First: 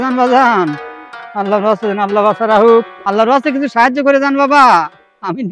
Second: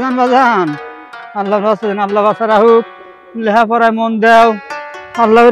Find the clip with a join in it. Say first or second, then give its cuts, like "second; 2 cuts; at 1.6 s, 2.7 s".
first; 1 cut; at 3.0 s